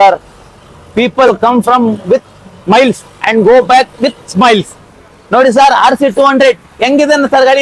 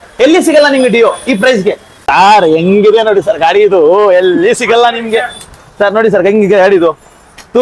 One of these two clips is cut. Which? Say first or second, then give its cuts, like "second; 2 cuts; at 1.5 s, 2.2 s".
second; 1 cut; at 1.9 s